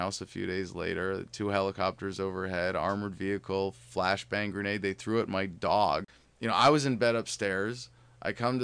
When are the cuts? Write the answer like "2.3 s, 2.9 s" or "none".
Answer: 6.2 s

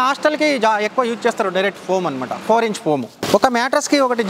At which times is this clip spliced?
3.2 s

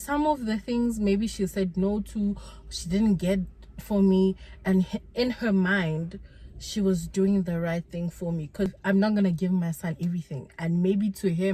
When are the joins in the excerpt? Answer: 8.8 s

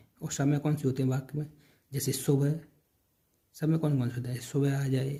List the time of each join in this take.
none

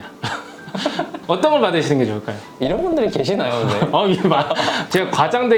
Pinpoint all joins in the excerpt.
none

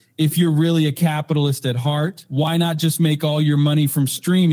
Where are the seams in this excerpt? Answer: 2.2 s

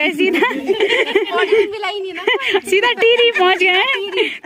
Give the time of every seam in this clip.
none

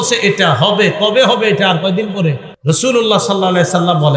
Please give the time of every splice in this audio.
2.5 s

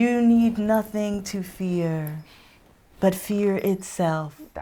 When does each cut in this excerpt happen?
none

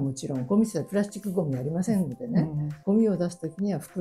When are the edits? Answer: 2.7 s

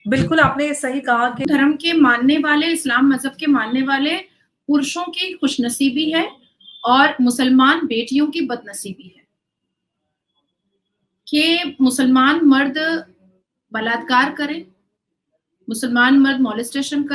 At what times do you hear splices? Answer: 1.4 s

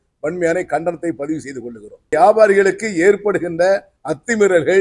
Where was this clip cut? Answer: 2.1 s

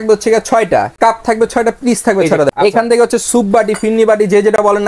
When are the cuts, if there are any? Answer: 1.0 s, 2.5 s

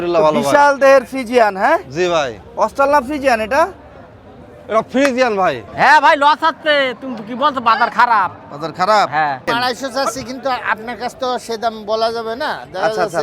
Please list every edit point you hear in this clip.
5.6 s, 9.4 s

